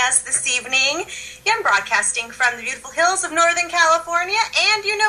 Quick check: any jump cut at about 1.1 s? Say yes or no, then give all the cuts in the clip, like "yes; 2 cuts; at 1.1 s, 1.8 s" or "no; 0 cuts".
no; 1 cut; at 2.8 s